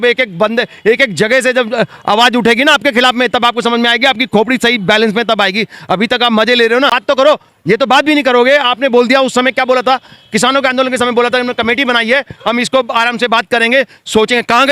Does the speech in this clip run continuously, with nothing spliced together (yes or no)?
no